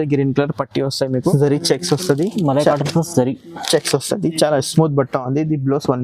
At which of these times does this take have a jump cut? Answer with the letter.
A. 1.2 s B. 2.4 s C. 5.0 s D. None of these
A